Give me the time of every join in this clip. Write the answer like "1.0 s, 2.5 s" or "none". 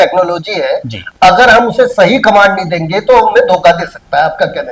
none